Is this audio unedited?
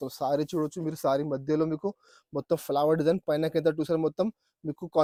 yes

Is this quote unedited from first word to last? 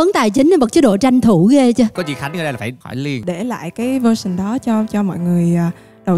no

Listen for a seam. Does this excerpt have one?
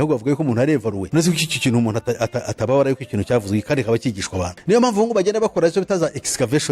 yes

